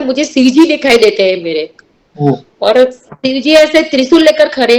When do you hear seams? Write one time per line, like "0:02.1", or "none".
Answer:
none